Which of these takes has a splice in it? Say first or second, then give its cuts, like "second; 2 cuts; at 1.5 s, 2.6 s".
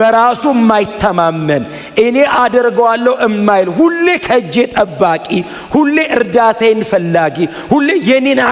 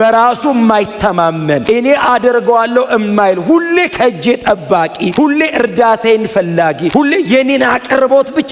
second; 3 cuts; at 1.6 s, 5.1 s, 6.9 s